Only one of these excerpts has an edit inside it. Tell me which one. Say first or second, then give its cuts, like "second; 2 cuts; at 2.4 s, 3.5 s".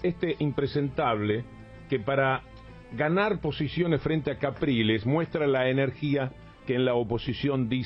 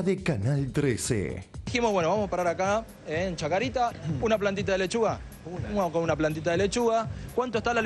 second; 2 cuts; at 1.6 s, 3.9 s